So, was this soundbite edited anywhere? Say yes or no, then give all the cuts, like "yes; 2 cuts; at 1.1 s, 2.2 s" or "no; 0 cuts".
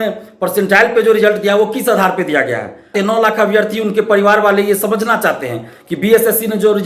yes; 1 cut; at 2.9 s